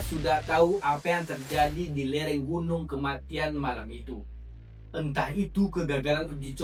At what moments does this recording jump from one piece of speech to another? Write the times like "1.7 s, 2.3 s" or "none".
none